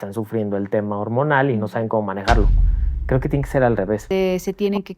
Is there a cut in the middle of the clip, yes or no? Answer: yes